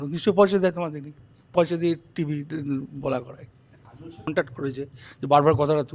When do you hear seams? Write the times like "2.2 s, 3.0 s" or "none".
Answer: 4.3 s

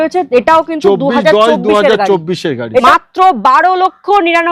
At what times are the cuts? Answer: 2.8 s

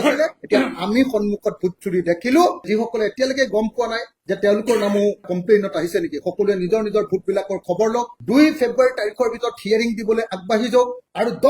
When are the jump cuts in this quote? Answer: 2.6 s

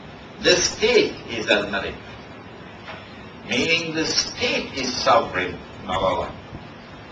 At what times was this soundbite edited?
5.8 s

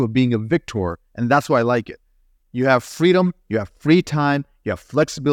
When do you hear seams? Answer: none

